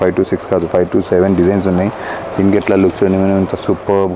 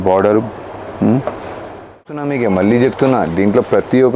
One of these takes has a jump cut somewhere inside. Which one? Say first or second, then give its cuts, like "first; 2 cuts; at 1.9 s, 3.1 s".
second; 1 cut; at 2.2 s